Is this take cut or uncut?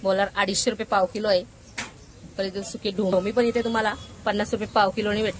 cut